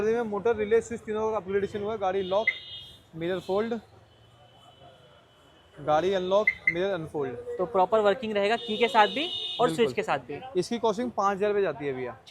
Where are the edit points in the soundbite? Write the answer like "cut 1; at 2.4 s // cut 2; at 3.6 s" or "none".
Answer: none

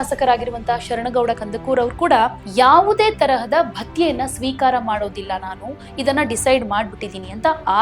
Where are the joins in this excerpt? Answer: cut 1; at 2.4 s

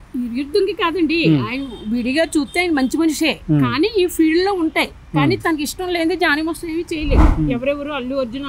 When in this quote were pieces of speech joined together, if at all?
cut 1; at 7.3 s

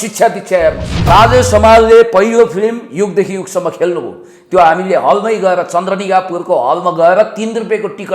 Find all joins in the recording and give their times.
cut 1; at 1.1 s

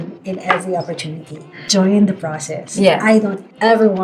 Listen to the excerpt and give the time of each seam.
cut 1; at 1.5 s

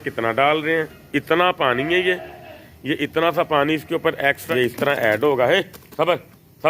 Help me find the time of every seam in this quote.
cut 1; at 1.0 s // cut 2; at 4.4 s

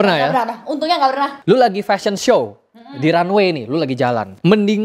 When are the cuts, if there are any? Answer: cut 1; at 1.4 s

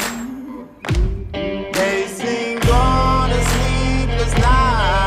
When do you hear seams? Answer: cut 1; at 3.2 s

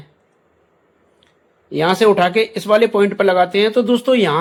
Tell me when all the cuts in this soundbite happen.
none

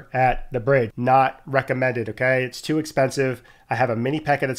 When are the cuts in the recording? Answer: cut 1; at 0.9 s

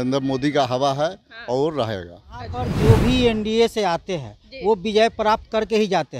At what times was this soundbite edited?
cut 1; at 2.7 s

